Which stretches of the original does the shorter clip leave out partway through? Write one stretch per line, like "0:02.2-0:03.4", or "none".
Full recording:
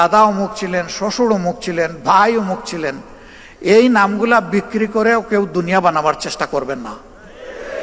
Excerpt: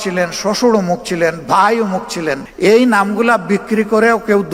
0:03.0-0:03.5